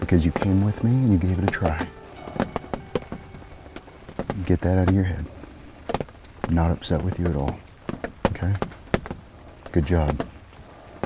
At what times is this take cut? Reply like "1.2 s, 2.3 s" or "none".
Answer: none